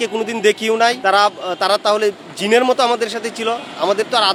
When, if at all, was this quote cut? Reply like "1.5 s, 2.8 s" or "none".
none